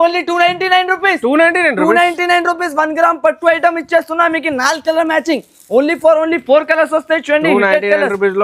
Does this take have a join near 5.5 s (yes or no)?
no